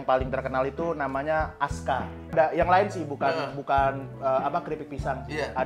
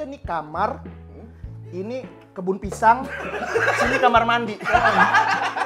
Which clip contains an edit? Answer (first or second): first